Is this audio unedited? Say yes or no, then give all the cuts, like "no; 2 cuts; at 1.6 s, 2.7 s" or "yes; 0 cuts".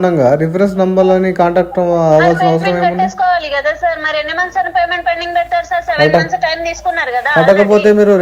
yes; 0 cuts